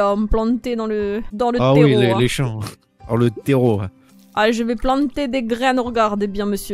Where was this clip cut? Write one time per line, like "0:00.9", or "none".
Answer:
0:01.3

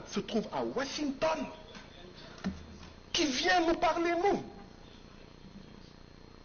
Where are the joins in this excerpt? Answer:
none

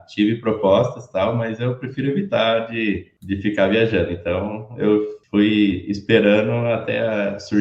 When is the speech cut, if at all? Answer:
0:03.1
0:05.2

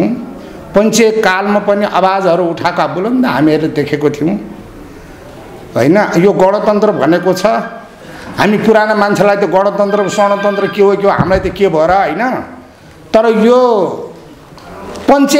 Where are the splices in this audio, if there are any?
none

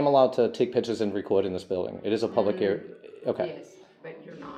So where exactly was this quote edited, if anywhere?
none

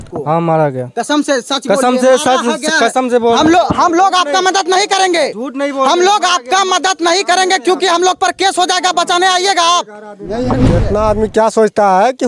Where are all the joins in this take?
0:10.5

